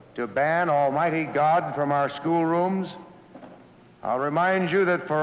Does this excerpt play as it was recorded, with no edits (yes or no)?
yes